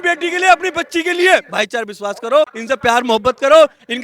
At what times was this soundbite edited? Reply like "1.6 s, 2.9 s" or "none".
1.4 s, 2.6 s